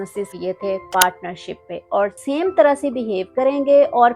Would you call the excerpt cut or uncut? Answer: cut